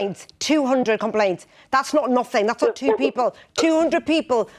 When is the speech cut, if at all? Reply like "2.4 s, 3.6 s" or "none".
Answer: none